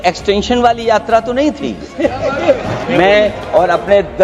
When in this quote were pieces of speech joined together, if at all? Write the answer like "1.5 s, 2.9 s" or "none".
2.8 s